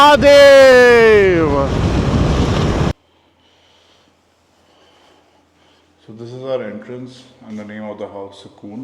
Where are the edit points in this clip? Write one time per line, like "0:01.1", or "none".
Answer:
0:02.9